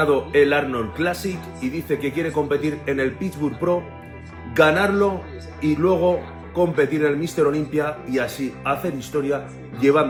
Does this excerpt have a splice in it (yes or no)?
no